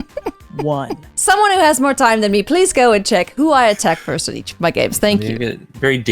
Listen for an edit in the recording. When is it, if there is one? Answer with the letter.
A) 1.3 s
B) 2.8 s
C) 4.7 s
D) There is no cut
A